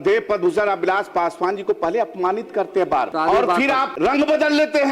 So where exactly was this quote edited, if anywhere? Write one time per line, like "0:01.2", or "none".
0:03.1
0:03.9